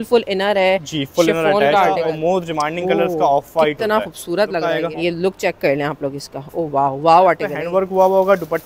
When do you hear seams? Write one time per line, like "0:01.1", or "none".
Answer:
0:01.9
0:04.8
0:07.5